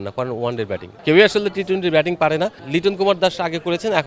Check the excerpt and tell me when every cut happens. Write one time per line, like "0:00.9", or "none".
0:00.9
0:02.6